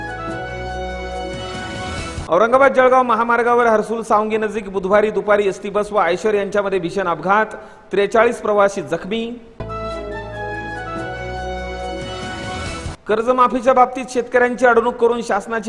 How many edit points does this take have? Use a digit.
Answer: 1